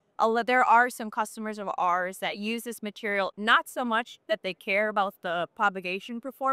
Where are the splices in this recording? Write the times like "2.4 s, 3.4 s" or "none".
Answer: none